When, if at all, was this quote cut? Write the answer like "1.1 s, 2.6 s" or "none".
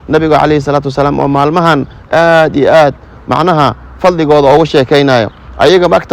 none